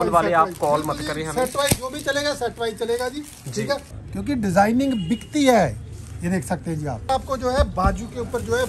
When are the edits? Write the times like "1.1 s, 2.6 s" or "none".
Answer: 4.0 s, 7.1 s